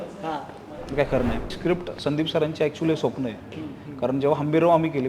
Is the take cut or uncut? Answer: cut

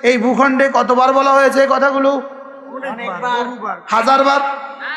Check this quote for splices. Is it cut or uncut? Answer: uncut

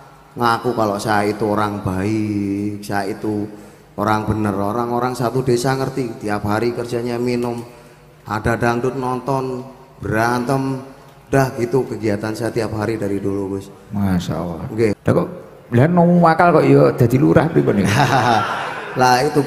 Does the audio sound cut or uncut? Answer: cut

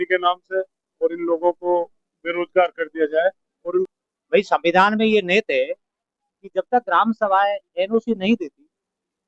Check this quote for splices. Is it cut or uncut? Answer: cut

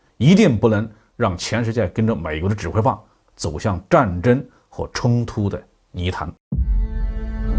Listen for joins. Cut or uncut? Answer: cut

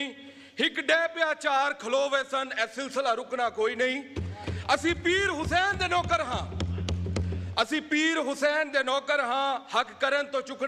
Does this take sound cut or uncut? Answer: uncut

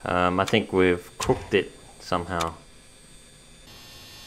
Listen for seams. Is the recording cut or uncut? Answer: uncut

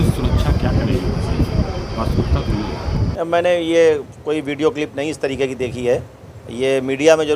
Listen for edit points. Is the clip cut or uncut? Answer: cut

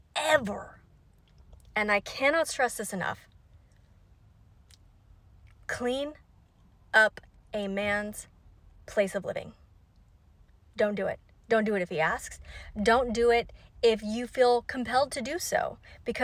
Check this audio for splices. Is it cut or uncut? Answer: uncut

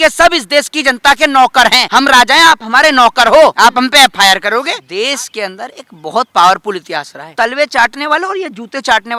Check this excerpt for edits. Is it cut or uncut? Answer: cut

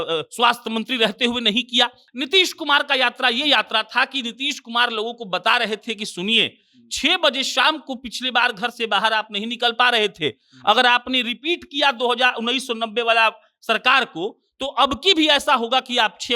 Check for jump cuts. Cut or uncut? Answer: cut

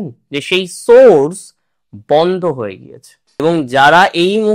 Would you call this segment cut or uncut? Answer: cut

